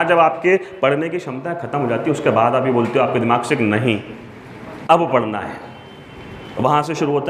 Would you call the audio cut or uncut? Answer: uncut